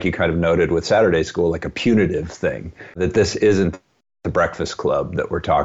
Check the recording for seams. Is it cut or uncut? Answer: cut